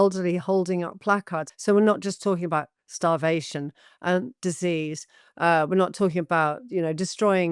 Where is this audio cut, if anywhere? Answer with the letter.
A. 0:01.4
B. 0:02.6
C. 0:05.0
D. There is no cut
A